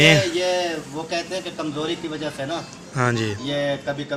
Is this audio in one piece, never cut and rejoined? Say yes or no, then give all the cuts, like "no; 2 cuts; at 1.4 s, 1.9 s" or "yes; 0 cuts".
yes; 0 cuts